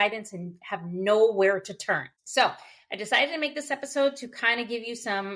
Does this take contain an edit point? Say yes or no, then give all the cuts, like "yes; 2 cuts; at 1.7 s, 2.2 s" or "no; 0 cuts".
yes; 1 cut; at 2.2 s